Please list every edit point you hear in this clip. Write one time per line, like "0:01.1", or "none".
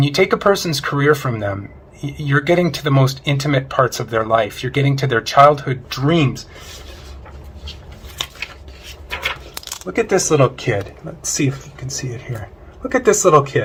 none